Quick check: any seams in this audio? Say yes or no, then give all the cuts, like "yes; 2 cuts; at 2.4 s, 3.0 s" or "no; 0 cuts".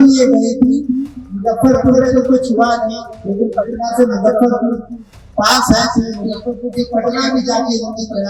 no; 0 cuts